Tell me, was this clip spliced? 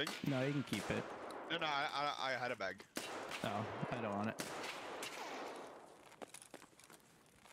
no; 0 cuts

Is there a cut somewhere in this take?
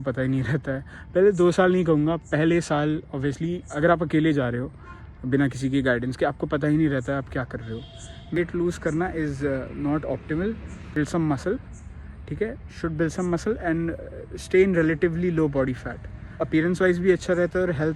yes; 3 cuts; at 8.4 s, 11.0 s, 16.4 s

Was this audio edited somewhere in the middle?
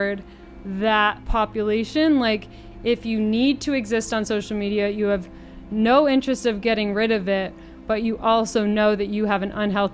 no; 0 cuts

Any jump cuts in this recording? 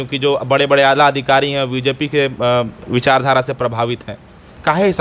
no; 0 cuts

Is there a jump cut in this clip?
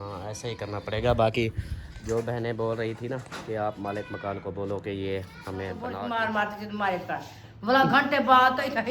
yes; 1 cut; at 5.9 s

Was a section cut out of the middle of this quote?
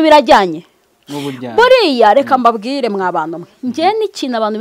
no; 0 cuts

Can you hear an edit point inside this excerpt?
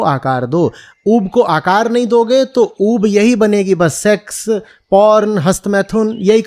no; 0 cuts

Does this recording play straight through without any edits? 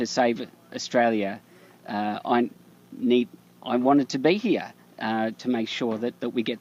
yes; 0 cuts

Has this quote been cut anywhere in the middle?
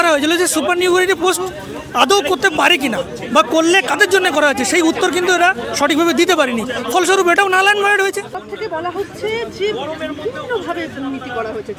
no; 0 cuts

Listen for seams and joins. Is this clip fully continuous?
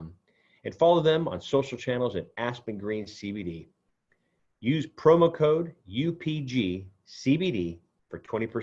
yes; 0 cuts

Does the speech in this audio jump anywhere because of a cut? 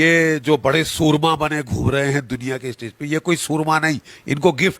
no; 0 cuts

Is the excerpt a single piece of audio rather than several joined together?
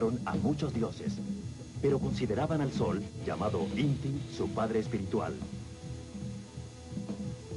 yes; 0 cuts

